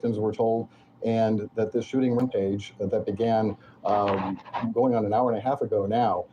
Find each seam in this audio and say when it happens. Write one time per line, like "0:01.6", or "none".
0:02.2